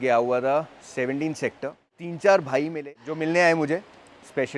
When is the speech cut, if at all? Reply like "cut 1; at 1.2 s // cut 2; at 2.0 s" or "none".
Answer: cut 1; at 2.0 s // cut 2; at 3.0 s